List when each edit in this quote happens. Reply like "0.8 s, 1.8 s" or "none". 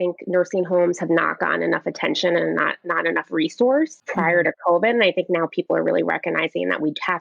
4.0 s